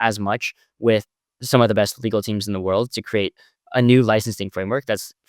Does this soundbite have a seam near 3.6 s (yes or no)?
no